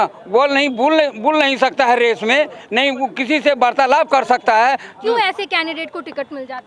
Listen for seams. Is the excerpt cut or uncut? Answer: uncut